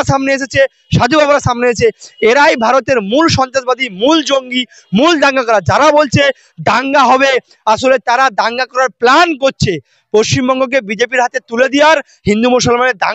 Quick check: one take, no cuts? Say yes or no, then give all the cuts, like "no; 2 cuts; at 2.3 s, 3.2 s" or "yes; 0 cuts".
yes; 0 cuts